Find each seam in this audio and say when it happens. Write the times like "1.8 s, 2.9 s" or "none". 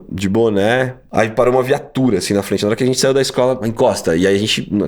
1.0 s, 3.6 s